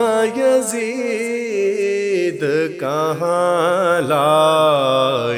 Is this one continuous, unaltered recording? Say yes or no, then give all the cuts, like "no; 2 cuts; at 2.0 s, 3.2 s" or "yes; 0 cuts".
yes; 0 cuts